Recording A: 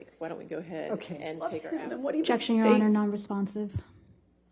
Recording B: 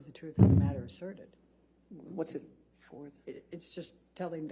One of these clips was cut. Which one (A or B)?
A